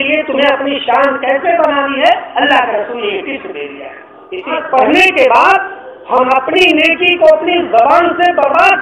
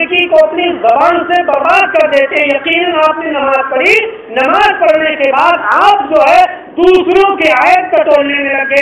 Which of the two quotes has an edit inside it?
first; 1 cut; at 4.6 s

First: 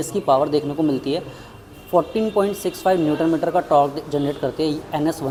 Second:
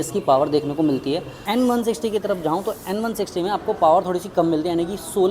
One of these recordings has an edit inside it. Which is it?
second; 1 cut; at 1.3 s

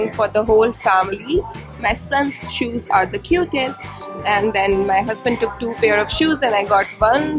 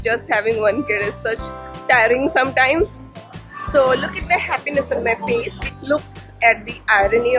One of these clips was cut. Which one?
second; 2 cuts; at 3.5 s, 5.6 s

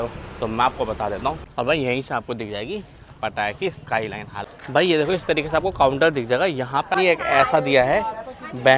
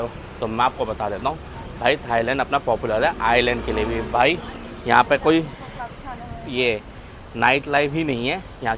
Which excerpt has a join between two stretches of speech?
first; 3 cuts; at 1.4 s, 4.4 s, 6.9 s

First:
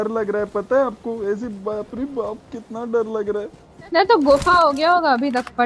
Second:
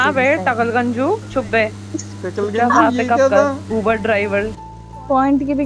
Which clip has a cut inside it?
second; 1 cut; at 4.6 s

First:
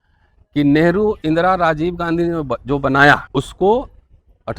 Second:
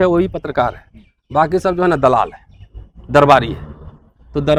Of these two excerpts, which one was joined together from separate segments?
first; 1 cut; at 3.3 s

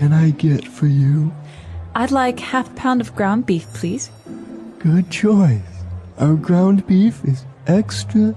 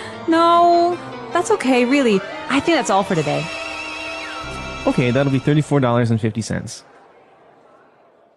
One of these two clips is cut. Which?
second; 1 cut; at 4.4 s

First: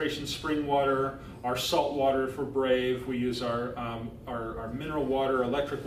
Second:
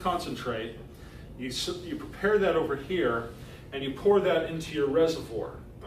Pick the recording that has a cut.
second; 1 cut; at 2.4 s

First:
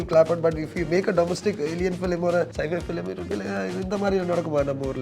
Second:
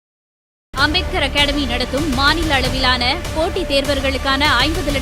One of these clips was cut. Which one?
first; 1 cut; at 2.5 s

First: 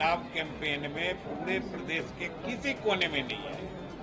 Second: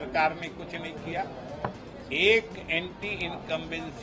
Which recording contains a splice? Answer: second; 1 cut; at 1.9 s

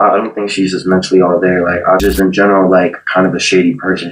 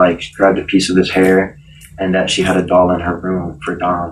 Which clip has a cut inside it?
first; 1 cut; at 2.0 s

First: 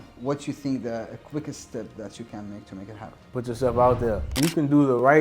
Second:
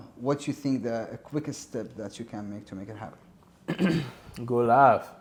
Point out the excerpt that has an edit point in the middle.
first; 2 cuts; at 3.3 s, 4.3 s

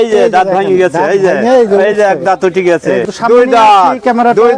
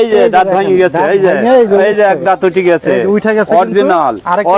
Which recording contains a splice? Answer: first; 1 cut; at 3.0 s

